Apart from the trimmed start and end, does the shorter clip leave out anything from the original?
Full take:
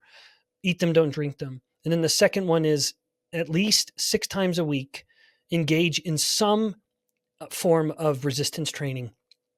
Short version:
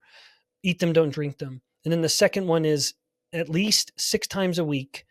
no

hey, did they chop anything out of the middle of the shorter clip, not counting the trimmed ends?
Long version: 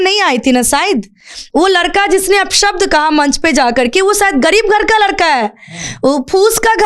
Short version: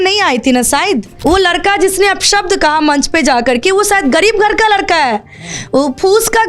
yes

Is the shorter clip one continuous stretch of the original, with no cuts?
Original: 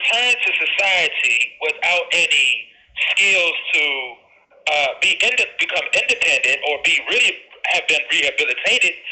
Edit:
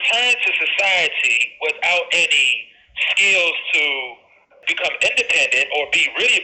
no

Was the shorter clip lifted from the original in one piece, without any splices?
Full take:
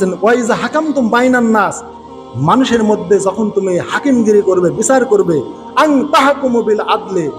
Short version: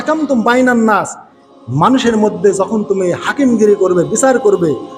yes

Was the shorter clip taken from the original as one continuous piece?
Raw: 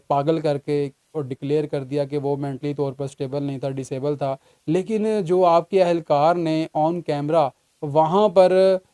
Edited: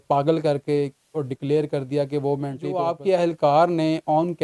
no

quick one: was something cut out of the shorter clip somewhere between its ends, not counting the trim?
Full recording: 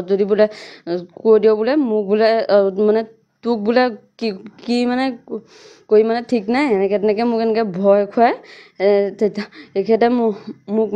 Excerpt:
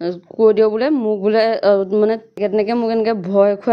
yes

